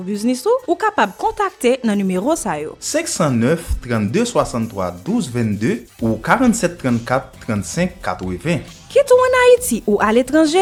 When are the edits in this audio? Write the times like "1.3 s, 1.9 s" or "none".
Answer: none